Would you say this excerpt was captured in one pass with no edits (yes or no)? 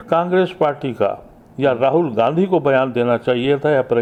yes